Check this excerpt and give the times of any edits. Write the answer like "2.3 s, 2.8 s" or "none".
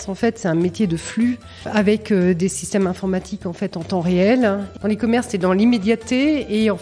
1.7 s, 4.7 s